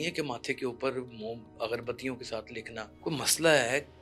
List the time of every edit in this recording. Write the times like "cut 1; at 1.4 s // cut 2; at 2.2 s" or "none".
cut 1; at 2.9 s